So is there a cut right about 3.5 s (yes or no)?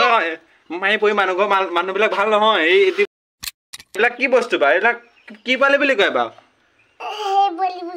yes